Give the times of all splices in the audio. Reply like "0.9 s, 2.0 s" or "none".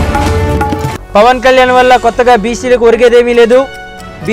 0.9 s